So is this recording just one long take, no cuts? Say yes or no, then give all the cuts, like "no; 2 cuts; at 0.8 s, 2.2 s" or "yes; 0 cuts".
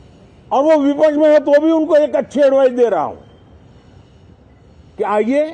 yes; 0 cuts